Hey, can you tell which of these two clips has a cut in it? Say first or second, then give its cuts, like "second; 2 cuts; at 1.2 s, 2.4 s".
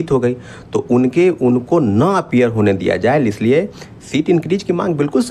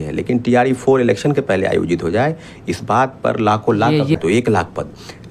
second; 1 cut; at 4.2 s